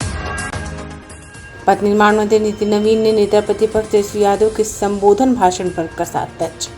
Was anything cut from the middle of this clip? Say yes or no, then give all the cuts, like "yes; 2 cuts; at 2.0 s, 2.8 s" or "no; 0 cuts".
yes; 1 cut; at 1.3 s